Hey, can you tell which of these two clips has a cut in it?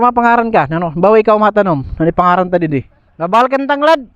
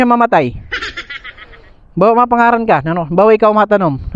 first; 1 cut; at 3.0 s

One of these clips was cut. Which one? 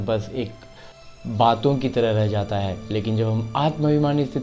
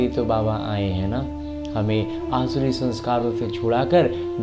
first; 1 cut; at 1.2 s

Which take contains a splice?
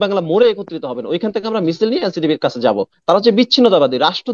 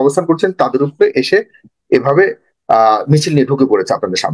first; 1 cut; at 2.9 s

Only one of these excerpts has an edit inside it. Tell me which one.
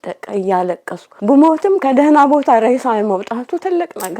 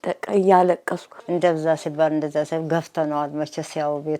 second; 1 cut; at 1.1 s

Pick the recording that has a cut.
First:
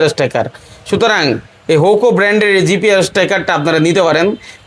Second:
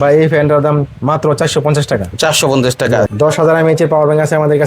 second; 1 cut; at 3.1 s

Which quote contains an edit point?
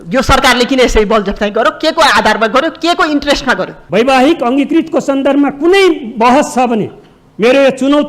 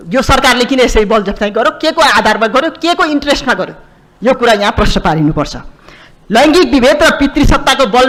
first; 1 cut; at 3.7 s

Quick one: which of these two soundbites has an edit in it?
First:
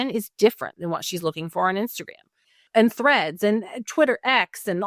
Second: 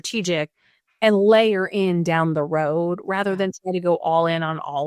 first; 1 cut; at 2.5 s

